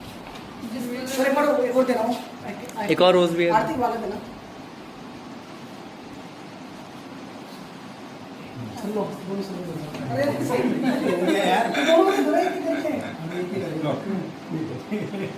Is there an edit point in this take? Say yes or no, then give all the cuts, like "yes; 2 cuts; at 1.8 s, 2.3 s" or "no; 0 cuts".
no; 0 cuts